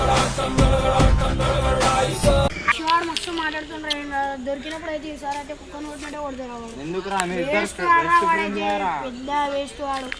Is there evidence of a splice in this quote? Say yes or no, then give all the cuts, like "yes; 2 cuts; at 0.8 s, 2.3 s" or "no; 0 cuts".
yes; 1 cut; at 2.7 s